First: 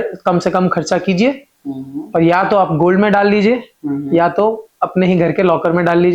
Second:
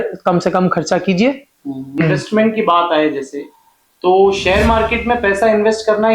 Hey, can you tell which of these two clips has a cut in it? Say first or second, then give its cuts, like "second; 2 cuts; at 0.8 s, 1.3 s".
second; 1 cut; at 2.0 s